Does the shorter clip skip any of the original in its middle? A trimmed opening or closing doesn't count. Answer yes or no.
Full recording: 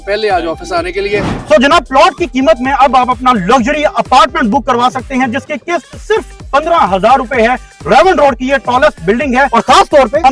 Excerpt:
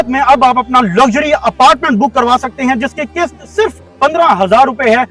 no